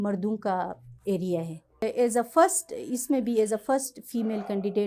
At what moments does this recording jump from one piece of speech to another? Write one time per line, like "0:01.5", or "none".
0:01.8